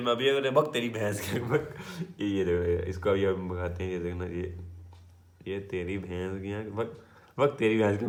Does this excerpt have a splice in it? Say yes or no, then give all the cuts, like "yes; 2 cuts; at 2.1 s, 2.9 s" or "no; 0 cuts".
no; 0 cuts